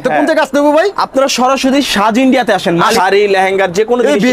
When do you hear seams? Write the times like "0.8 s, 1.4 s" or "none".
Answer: 2.9 s

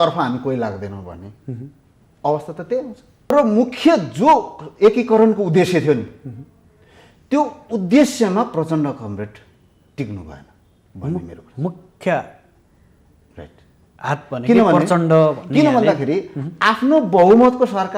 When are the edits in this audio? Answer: 3.3 s

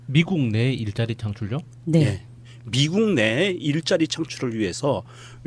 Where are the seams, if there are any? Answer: none

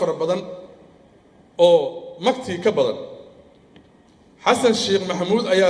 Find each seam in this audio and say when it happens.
4.1 s

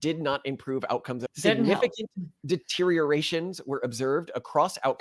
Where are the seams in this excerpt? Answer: 1.2 s

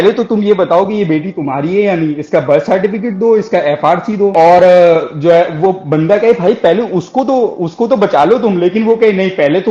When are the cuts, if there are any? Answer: none

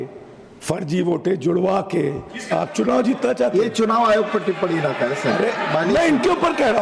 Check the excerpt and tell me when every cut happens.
none

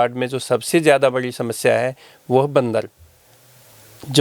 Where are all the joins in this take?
none

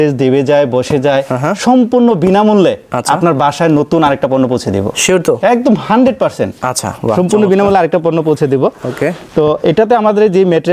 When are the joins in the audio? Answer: none

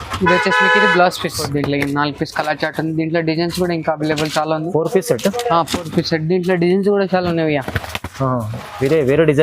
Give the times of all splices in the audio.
1.4 s

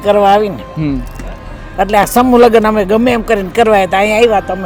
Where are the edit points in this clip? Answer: none

